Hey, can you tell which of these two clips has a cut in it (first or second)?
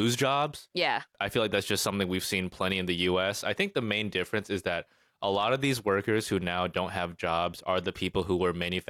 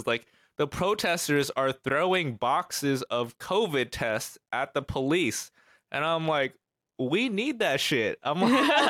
first